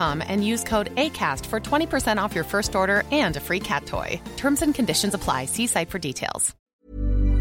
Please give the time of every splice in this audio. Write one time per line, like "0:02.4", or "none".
0:06.5